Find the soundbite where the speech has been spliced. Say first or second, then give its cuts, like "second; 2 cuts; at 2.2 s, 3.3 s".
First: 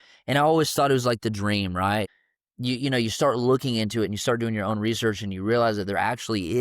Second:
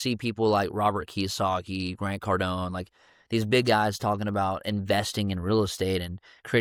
first; 1 cut; at 2.1 s